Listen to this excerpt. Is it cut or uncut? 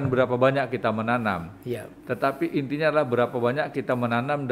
uncut